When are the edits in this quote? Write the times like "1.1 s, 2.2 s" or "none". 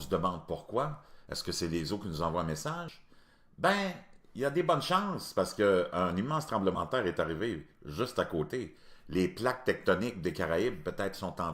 3.5 s